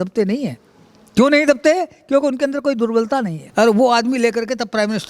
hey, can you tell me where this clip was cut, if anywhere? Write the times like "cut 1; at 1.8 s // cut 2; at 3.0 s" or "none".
cut 1; at 3.4 s

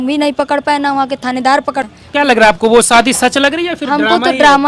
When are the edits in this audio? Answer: cut 1; at 1.9 s

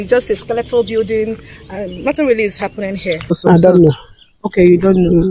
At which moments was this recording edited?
cut 1; at 3.4 s

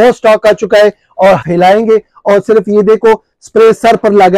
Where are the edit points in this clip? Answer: cut 1; at 1.4 s

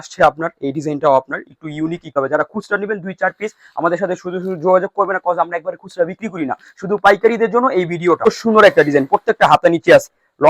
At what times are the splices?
cut 1; at 2.1 s // cut 2; at 8.3 s

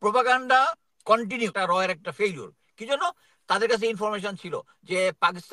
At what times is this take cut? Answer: cut 1; at 1.5 s

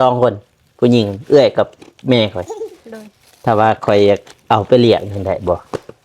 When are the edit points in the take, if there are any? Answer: none

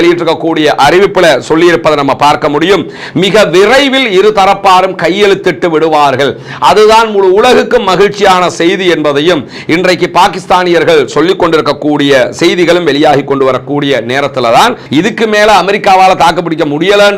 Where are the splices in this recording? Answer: cut 1; at 14.8 s

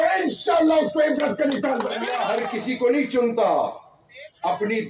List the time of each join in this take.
cut 1; at 2.2 s

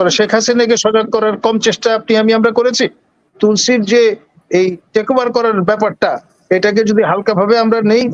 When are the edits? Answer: cut 1; at 3.3 s

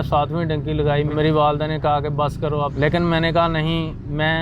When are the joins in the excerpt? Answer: cut 1; at 1.1 s // cut 2; at 2.7 s

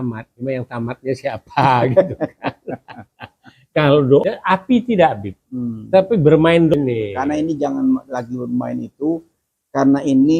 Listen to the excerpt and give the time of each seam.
cut 1; at 4.2 s // cut 2; at 6.7 s

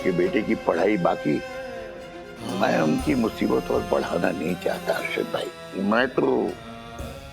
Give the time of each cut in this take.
cut 1; at 2.5 s // cut 2; at 5.6 s

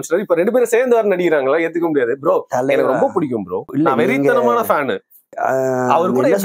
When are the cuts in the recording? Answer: cut 1; at 3.6 s

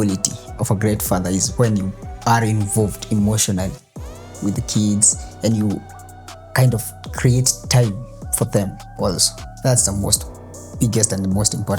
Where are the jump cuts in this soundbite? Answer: none

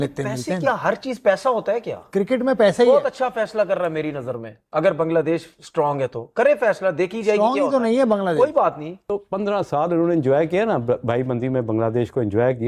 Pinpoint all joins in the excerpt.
cut 1; at 9.1 s

